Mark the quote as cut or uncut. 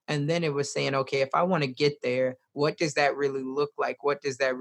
uncut